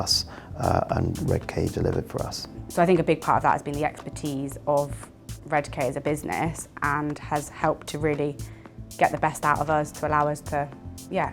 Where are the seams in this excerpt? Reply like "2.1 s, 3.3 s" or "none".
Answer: 2.6 s